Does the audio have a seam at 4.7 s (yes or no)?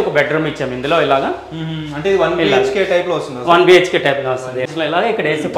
yes